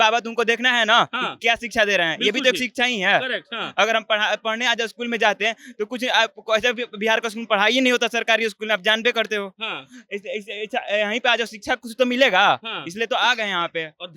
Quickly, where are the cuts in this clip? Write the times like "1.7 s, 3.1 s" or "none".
none